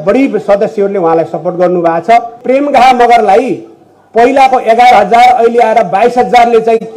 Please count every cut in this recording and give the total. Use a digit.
1